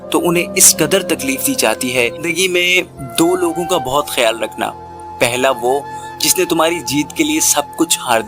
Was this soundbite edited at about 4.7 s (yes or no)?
no